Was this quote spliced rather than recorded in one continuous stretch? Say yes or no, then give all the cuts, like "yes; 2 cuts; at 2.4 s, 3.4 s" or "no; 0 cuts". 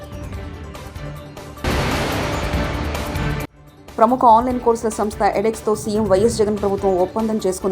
yes; 1 cut; at 1.6 s